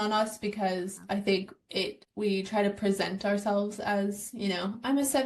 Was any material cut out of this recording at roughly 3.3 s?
no; 1 cut; at 2.0 s

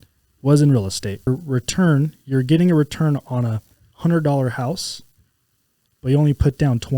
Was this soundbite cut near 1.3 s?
yes; 1 cut; at 1.3 s

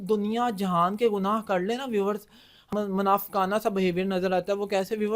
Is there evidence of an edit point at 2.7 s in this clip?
yes; 1 cut; at 2.7 s

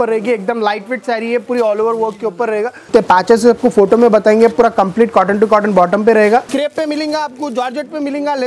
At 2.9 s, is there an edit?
yes; 2 cuts; at 2.9 s, 6.5 s

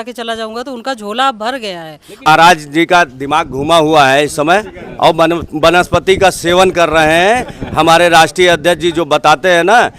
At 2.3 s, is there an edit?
yes; 1 cut; at 2.3 s

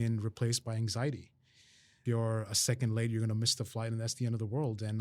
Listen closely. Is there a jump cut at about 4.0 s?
no; 1 cut; at 2.0 s

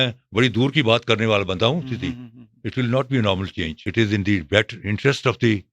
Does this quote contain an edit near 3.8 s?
yes; 1 cut; at 3.8 s

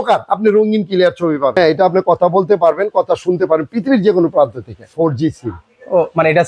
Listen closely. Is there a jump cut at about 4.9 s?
yes; 2 cuts; at 1.6 s, 4.9 s

